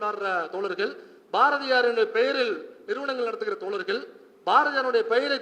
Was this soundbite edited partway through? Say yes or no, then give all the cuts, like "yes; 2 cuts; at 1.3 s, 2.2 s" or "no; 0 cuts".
no; 0 cuts